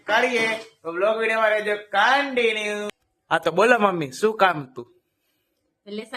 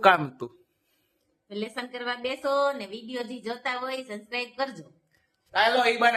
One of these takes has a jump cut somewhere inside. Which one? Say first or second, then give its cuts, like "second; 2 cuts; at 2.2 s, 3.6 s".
first; 1 cut; at 2.7 s